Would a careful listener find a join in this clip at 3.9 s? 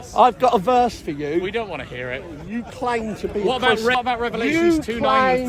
yes; 2 cuts; at 2.4 s, 3.9 s

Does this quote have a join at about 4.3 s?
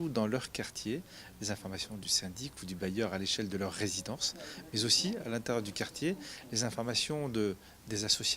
no; 1 cut; at 5.7 s

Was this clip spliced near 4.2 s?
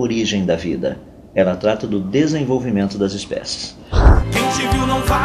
yes; 1 cut; at 4.2 s

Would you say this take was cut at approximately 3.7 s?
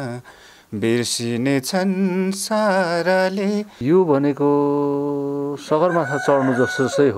yes; 1 cut; at 3.7 s

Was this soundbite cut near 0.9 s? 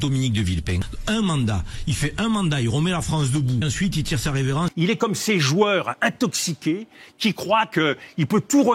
yes; 3 cuts; at 0.9 s, 3.7 s, 4.7 s

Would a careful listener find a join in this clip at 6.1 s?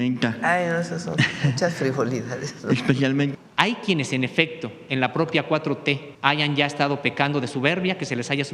yes; 2 cuts; at 3.3 s, 6.1 s

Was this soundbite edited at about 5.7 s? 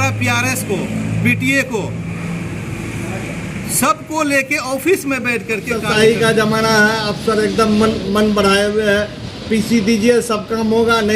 yes; 1 cut; at 5.7 s

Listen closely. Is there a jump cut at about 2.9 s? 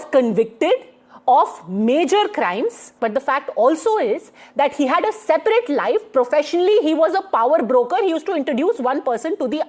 yes; 1 cut; at 2.9 s

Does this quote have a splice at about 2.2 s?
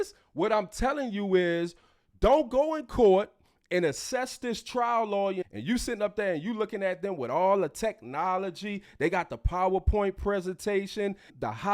no; 1 cut; at 5.5 s

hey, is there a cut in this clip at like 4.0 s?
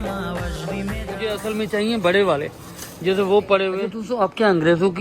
yes; 2 cuts; at 1.3 s, 4.0 s

